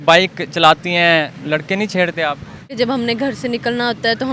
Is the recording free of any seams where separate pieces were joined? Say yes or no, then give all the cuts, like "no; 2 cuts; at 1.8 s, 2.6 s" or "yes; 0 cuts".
no; 2 cuts; at 1.4 s, 2.7 s